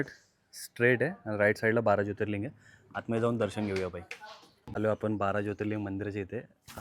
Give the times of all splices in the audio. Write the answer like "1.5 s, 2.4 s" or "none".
none